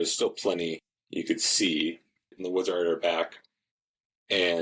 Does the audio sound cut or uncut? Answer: cut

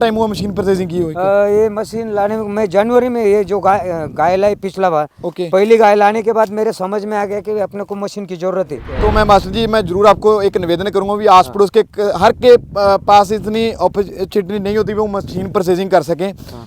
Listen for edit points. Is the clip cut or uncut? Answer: cut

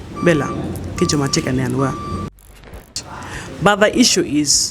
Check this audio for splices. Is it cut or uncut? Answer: cut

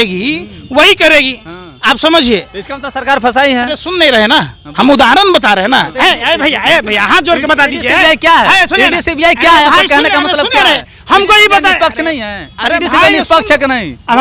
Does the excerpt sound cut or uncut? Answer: cut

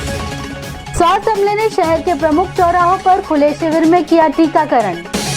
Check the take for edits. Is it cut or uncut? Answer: cut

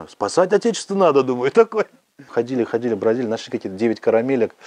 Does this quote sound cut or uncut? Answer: cut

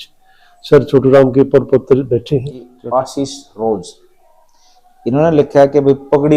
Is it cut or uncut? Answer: cut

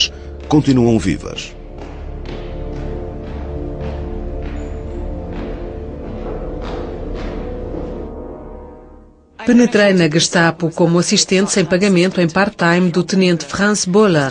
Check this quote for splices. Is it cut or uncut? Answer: cut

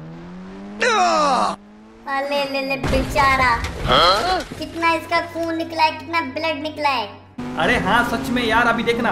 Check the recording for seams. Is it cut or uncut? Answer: cut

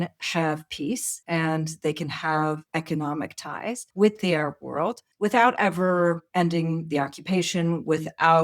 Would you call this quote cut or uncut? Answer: cut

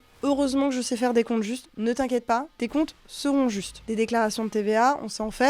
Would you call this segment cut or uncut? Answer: cut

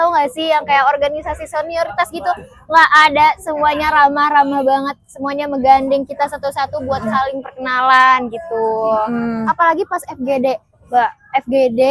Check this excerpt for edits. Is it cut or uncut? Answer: uncut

